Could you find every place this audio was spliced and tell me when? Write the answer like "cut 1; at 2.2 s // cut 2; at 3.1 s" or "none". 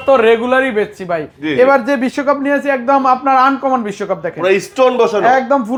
none